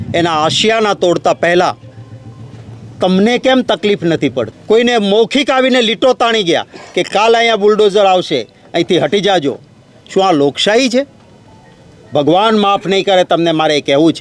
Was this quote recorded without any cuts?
no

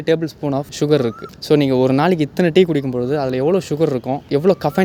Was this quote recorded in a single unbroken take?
yes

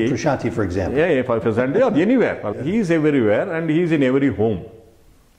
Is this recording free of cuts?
no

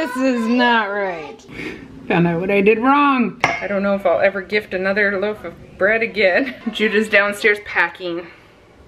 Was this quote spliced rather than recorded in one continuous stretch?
yes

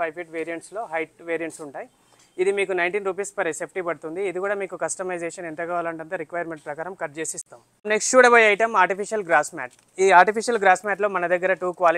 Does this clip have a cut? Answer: no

